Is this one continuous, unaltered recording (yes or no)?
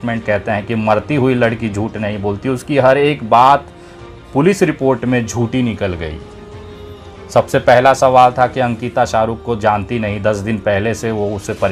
yes